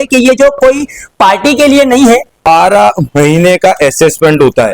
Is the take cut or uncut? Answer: cut